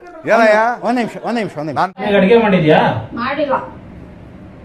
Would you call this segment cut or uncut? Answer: cut